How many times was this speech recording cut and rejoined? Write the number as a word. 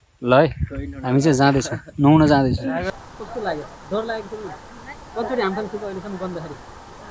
one